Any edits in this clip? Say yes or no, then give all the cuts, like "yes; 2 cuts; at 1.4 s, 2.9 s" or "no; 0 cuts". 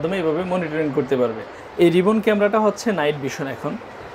yes; 1 cut; at 1.5 s